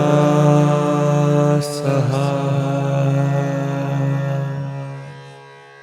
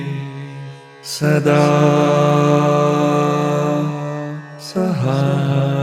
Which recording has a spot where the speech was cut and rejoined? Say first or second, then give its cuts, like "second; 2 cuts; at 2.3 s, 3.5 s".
first; 1 cut; at 4.9 s